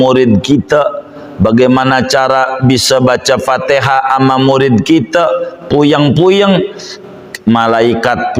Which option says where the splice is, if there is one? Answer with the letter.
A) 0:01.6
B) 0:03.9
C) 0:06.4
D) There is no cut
D